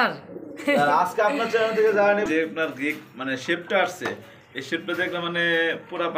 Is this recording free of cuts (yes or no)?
no